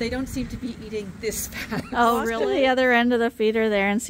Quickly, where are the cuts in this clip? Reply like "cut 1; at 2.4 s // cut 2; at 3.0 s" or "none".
cut 1; at 2.4 s